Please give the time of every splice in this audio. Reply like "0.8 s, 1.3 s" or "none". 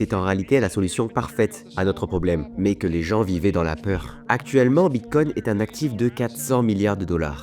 4.1 s